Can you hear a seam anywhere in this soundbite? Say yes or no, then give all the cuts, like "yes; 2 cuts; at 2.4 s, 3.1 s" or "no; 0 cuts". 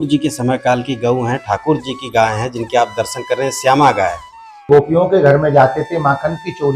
yes; 1 cut; at 4.5 s